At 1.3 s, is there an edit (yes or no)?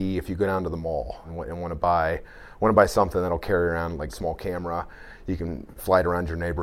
yes